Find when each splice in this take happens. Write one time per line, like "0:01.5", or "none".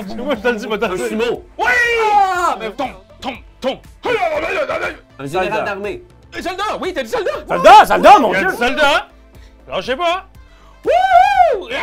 0:02.7